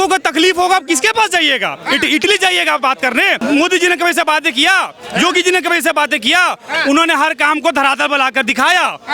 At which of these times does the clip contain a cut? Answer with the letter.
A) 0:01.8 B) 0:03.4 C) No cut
B